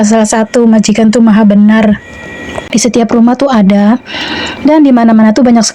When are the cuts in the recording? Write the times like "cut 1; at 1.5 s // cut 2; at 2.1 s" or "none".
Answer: cut 1; at 2.6 s